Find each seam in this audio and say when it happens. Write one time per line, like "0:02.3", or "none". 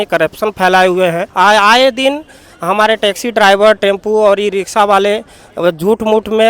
0:01.2